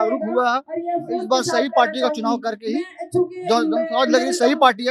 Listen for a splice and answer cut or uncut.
uncut